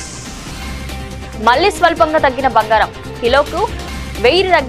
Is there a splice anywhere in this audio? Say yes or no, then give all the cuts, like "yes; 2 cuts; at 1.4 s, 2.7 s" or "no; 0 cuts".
no; 0 cuts